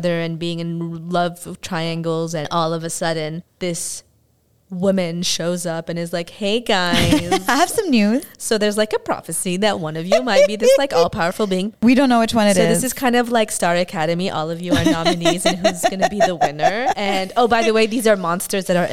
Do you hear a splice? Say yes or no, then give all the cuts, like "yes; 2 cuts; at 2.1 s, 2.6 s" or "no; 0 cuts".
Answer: yes; 3 cuts; at 2.4 s, 11.7 s, 17.0 s